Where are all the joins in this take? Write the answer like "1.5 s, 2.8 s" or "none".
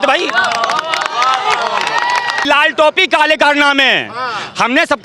2.4 s